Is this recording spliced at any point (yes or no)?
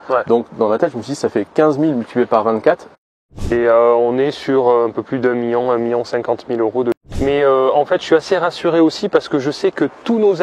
yes